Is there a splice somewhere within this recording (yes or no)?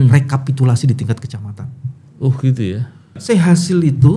yes